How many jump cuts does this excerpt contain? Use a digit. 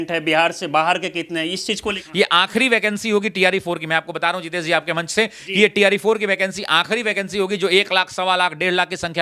1